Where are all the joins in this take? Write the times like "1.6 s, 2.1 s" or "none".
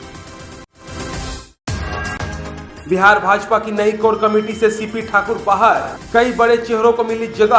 1.5 s